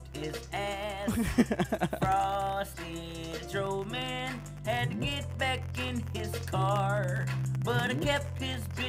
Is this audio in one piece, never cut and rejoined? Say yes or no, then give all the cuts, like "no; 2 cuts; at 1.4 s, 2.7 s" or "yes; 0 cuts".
yes; 0 cuts